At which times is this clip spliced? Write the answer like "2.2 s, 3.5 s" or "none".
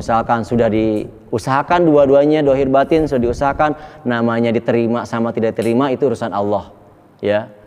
2.3 s